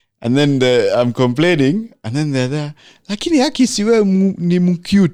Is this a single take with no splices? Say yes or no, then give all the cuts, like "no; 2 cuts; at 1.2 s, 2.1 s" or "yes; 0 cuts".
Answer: yes; 0 cuts